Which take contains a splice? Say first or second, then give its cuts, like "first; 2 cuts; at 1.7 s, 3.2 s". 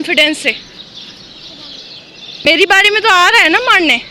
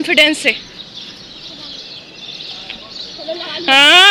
first; 1 cut; at 2.5 s